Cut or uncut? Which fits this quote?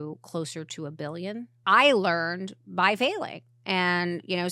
cut